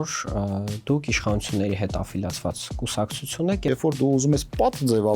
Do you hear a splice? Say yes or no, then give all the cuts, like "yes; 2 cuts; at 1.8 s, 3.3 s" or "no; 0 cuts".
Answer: yes; 1 cut; at 3.7 s